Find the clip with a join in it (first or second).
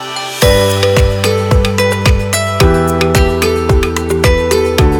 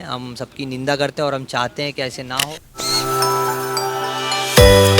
second